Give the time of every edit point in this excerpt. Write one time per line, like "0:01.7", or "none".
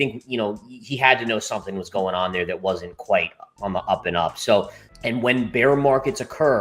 0:04.8